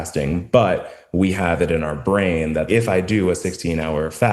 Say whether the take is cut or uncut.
cut